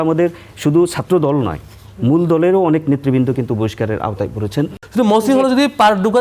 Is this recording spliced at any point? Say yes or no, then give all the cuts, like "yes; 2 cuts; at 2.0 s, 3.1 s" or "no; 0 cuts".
yes; 1 cut; at 4.8 s